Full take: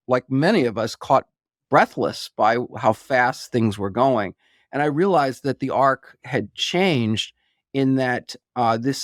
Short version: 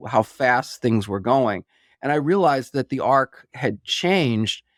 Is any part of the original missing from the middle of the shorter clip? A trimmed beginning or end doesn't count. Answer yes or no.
no